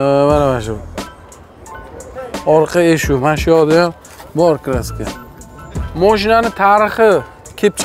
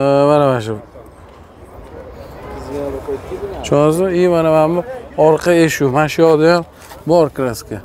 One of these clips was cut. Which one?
first; 2 cuts; at 2.3 s, 5.8 s

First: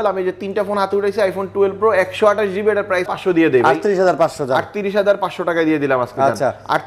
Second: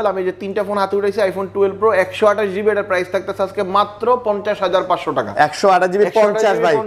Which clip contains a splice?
first; 1 cut; at 3.1 s

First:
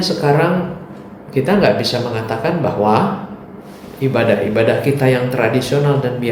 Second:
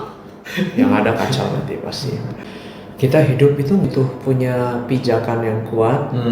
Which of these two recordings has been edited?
second; 2 cuts; at 2.4 s, 3.8 s

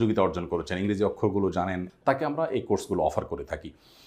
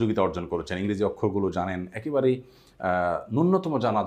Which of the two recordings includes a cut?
first; 1 cut; at 1.9 s

